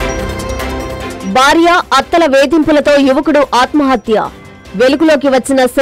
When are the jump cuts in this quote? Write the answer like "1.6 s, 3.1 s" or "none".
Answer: none